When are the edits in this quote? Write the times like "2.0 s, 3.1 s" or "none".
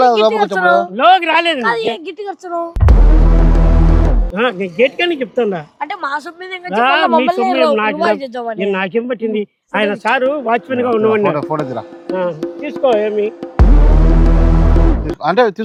none